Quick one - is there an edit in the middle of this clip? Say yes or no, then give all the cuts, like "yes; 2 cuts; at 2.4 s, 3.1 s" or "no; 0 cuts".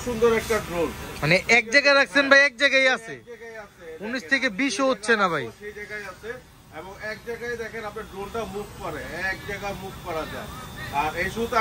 no; 0 cuts